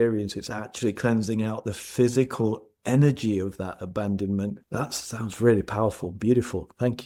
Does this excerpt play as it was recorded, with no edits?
yes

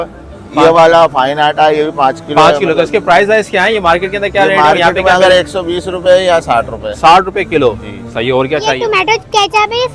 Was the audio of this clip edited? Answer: yes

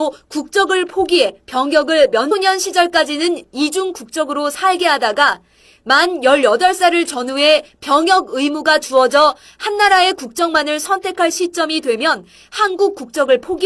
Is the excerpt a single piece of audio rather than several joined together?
yes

